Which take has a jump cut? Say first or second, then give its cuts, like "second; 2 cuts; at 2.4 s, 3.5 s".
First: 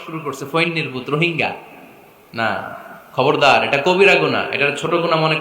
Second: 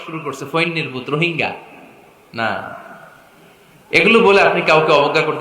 first; 1 cut; at 2.9 s